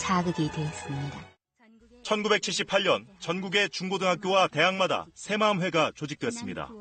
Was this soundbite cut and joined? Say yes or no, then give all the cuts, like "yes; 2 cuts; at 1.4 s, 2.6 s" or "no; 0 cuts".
no; 0 cuts